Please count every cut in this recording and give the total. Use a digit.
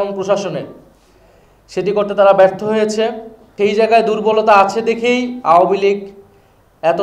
1